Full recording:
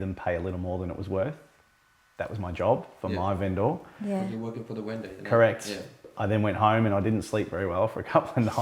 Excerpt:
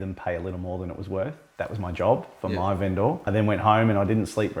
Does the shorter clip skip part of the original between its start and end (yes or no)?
yes